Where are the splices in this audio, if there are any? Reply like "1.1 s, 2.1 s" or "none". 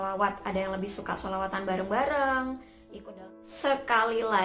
2.9 s

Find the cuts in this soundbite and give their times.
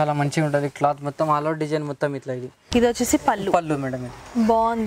2.6 s

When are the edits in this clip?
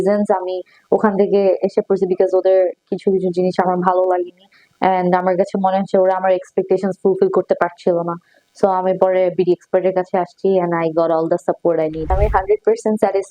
12.1 s

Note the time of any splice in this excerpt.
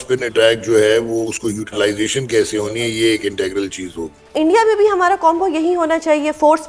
4.3 s

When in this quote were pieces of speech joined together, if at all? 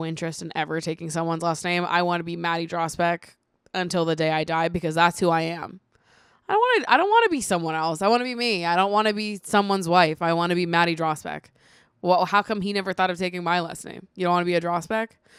none

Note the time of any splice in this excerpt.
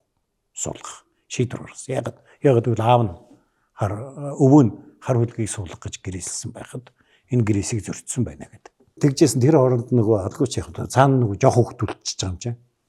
8.9 s

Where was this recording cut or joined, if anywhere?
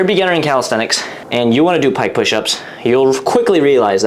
none

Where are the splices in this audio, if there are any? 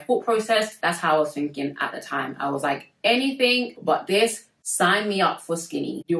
none

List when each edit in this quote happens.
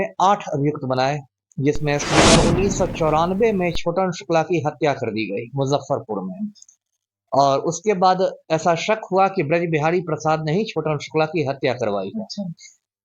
2.3 s

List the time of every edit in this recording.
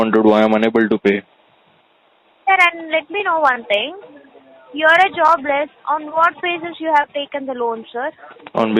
none

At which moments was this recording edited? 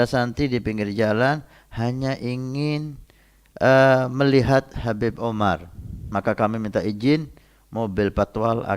6.0 s

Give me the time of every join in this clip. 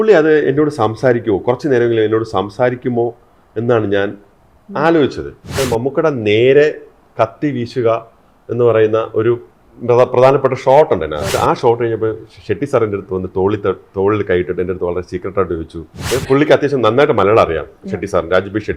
5.6 s, 11.3 s, 15.9 s

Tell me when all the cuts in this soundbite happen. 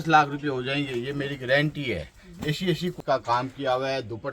3.0 s

